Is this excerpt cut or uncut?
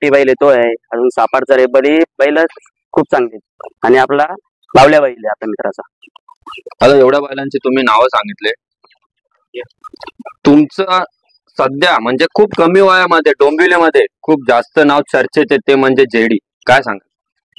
uncut